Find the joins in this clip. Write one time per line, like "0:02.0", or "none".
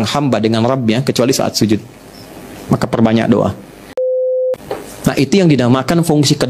0:04.2